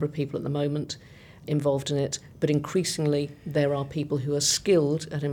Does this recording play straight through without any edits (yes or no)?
yes